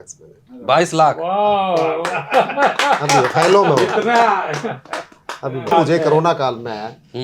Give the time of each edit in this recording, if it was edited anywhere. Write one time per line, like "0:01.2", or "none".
0:05.7

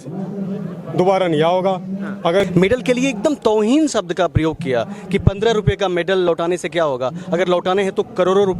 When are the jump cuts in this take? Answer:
0:02.4

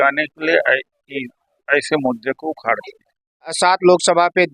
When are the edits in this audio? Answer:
0:03.6

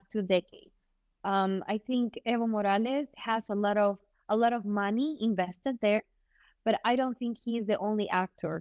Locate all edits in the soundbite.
0:01.0

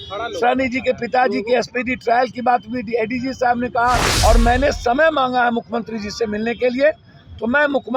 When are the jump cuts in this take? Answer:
0:04.1

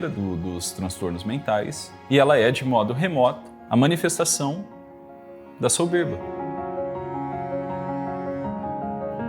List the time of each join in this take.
0:01.9
0:03.5

